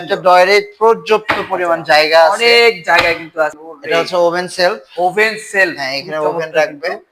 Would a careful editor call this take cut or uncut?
cut